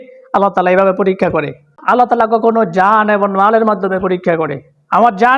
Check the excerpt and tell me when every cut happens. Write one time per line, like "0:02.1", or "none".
0:01.7